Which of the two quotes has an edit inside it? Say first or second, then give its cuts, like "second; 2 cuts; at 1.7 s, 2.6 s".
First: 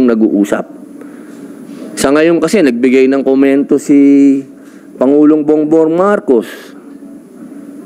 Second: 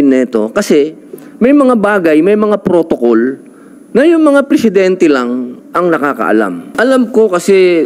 second; 1 cut; at 6.7 s